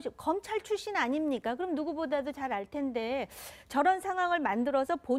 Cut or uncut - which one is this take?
uncut